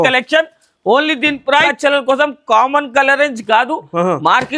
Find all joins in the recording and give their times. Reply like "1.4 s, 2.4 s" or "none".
1.7 s